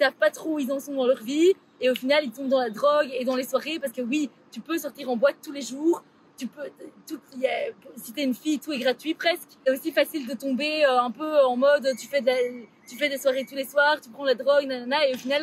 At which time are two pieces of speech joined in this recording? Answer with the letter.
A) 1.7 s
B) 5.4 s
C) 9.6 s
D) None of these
C